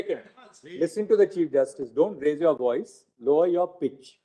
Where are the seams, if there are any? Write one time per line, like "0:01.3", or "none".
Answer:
none